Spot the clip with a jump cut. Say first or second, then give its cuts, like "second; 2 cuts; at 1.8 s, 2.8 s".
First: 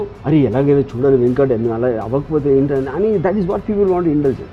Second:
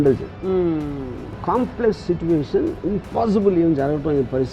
second; 1 cut; at 1.4 s